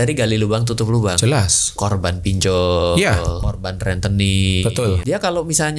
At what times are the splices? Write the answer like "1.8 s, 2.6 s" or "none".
3.4 s, 5.0 s